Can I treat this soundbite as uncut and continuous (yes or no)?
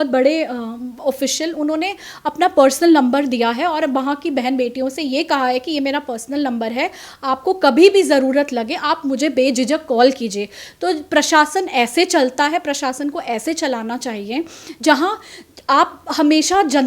yes